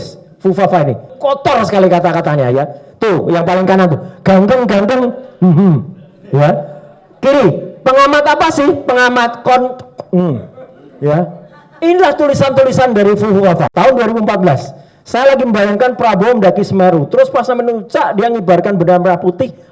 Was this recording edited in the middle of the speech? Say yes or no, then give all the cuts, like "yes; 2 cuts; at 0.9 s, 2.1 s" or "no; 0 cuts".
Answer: yes; 2 cuts; at 1.1 s, 13.7 s